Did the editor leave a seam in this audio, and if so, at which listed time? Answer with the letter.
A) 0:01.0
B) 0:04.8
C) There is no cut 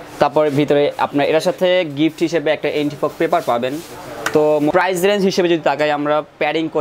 B